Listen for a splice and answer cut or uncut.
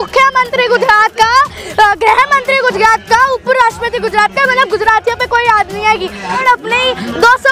cut